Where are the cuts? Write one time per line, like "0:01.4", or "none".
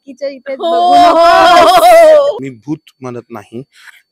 0:02.4